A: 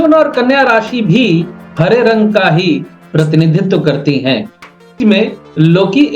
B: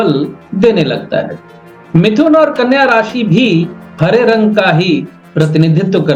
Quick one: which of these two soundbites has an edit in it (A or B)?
A